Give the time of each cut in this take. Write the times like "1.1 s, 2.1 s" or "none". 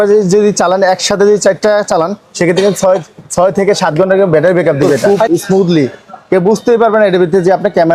5.0 s